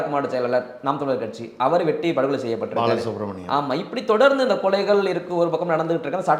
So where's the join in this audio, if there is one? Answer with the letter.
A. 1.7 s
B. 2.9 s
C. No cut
C